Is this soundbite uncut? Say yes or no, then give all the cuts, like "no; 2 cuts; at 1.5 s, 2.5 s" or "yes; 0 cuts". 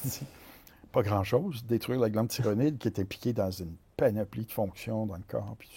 yes; 0 cuts